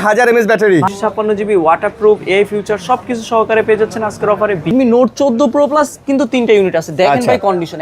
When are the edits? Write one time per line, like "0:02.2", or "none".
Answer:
0:00.9
0:04.7

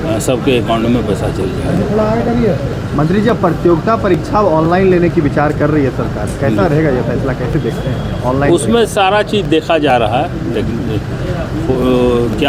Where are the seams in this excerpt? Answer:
none

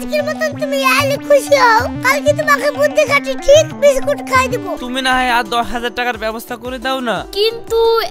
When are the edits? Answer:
0:04.8

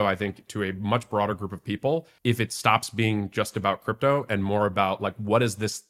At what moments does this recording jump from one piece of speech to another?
0:02.1

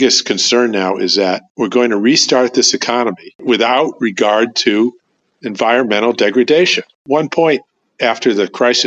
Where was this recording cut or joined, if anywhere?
0:07.1

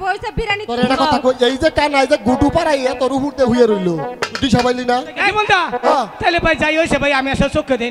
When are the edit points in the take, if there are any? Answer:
0:00.8
0:05.2

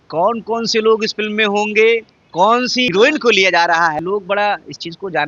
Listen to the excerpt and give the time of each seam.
0:02.9
0:04.0

